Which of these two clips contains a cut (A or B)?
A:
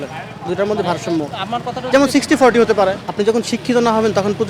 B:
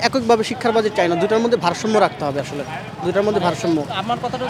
A